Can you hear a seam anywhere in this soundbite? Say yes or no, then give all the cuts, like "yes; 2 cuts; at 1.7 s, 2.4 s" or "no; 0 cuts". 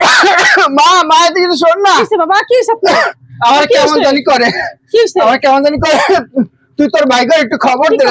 no; 0 cuts